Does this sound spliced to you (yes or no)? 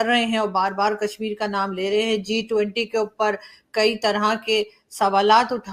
no